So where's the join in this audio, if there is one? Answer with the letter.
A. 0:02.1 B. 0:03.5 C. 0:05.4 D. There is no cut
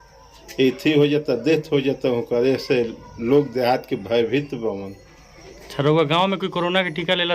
D